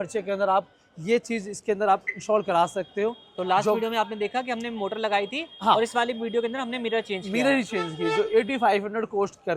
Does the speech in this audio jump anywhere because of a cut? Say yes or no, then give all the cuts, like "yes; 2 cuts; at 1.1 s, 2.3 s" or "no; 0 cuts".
no; 0 cuts